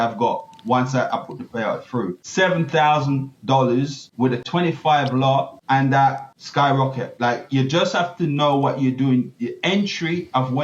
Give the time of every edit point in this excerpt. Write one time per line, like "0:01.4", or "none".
0:02.2
0:04.5
0:05.6
0:06.3